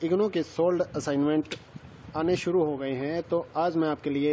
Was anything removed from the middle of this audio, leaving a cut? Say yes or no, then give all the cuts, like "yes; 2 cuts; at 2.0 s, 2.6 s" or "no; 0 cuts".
no; 0 cuts